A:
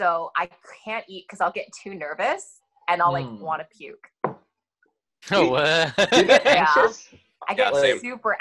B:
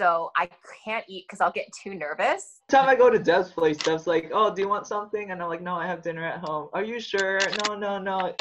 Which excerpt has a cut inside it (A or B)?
B